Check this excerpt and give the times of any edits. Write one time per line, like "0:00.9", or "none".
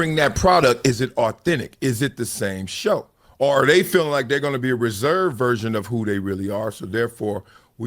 0:03.2